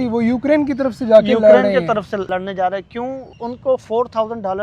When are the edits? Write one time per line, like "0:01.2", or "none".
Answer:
0:02.3
0:03.3